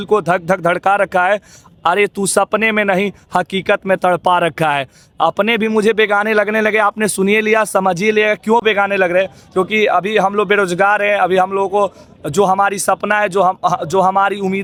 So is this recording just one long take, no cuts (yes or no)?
yes